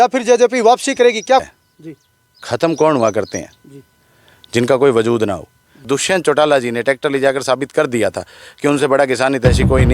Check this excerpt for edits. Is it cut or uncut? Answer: cut